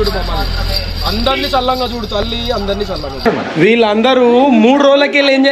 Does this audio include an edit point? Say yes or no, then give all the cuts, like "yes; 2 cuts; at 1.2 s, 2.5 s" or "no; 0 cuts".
yes; 1 cut; at 3.2 s